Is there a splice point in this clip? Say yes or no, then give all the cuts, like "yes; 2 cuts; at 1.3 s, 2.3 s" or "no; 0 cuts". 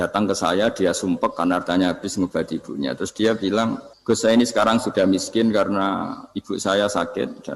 yes; 1 cut; at 3.9 s